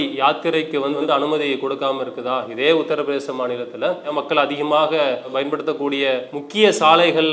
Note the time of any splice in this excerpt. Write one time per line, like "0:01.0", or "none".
0:01.0
0:04.1
0:06.4